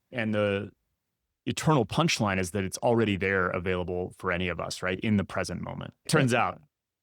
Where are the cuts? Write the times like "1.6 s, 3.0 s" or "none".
6.0 s